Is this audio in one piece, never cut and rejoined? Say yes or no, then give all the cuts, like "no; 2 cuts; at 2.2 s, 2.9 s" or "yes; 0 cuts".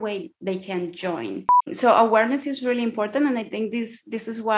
no; 1 cut; at 1.6 s